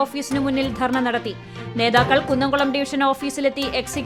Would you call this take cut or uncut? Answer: uncut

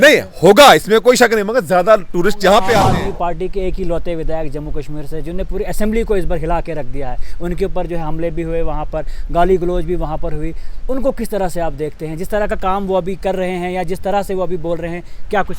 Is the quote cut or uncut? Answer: cut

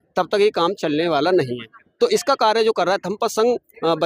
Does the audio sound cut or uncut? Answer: uncut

